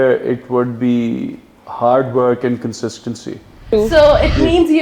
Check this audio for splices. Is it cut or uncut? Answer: cut